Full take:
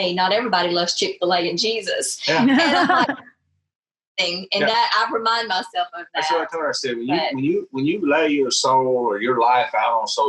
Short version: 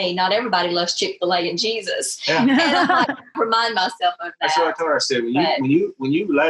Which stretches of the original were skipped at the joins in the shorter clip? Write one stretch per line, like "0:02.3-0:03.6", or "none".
0:03.4-0:05.1